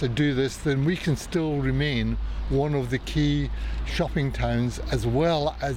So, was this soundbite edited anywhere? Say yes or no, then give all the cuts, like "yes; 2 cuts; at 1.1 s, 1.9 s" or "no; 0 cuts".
no; 0 cuts